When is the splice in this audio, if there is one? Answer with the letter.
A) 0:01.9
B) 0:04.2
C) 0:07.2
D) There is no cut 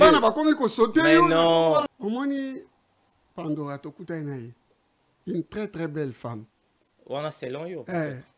A